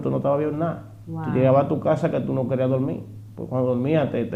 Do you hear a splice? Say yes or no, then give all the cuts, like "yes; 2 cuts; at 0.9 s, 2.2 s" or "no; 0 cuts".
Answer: no; 0 cuts